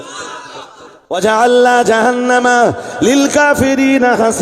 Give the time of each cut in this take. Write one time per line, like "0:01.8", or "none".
0:01.1